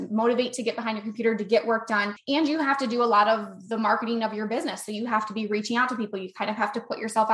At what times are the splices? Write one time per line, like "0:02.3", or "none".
0:02.1